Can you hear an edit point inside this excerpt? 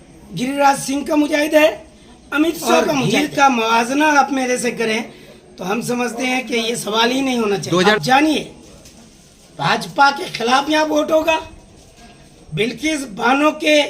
yes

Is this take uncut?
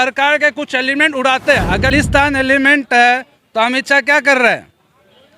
no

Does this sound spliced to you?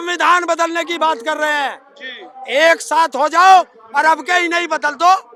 no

